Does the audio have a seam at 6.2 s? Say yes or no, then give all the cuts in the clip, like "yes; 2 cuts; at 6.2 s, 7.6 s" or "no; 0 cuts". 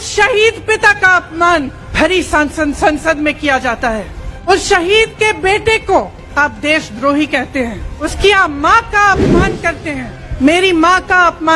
yes; 5 cuts; at 1.8 s, 4.5 s, 6.2 s, 8.0 s, 10.2 s